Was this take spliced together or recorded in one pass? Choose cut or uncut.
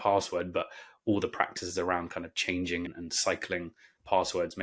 cut